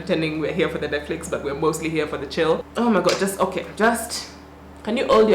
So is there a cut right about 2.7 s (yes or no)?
yes